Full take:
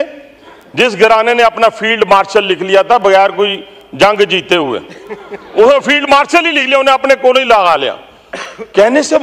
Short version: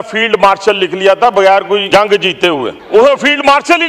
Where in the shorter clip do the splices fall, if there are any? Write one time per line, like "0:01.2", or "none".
0:01.8
0:02.8